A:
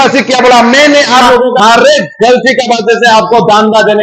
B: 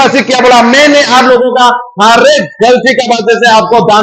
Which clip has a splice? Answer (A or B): A